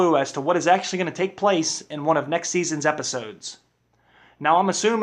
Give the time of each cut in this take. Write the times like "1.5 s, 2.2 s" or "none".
1.6 s